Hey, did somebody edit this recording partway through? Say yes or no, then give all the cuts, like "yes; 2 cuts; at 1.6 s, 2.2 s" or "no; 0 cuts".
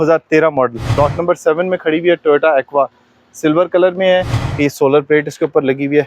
yes; 2 cuts; at 1.0 s, 4.4 s